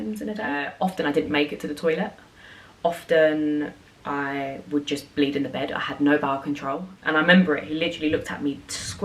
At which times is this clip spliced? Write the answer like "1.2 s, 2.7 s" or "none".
0.7 s, 6.9 s